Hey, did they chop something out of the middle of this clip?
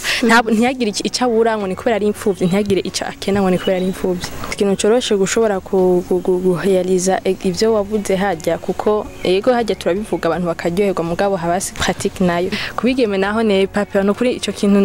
yes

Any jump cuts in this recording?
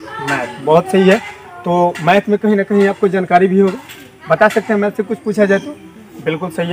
no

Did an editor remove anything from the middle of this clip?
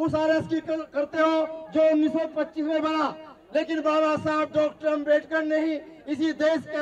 no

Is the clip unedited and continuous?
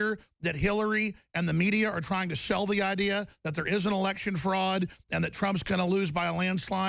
yes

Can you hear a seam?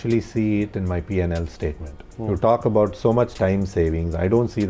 yes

